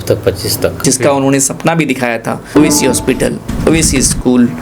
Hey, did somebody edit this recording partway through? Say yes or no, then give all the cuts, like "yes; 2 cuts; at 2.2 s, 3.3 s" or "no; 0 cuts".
yes; 2 cuts; at 0.8 s, 2.4 s